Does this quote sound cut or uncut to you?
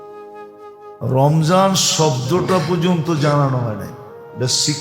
cut